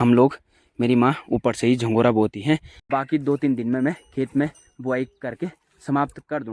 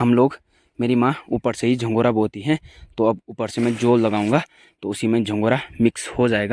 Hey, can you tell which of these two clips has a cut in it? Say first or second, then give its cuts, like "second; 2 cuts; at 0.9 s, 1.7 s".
first; 1 cut; at 2.7 s